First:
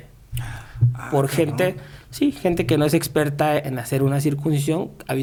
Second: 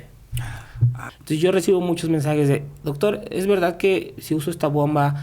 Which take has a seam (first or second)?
second